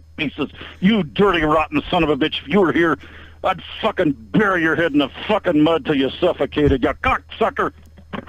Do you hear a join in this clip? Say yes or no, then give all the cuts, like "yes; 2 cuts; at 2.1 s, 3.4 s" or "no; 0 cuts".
no; 0 cuts